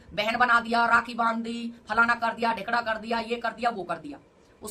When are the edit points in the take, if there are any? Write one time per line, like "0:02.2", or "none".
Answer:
none